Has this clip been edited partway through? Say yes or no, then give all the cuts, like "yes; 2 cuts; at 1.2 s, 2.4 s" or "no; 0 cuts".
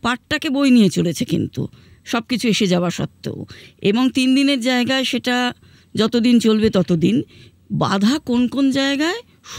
no; 0 cuts